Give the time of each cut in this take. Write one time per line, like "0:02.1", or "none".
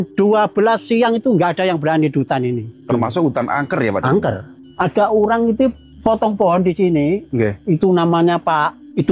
none